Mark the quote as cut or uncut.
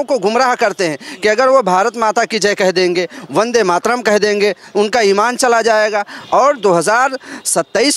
cut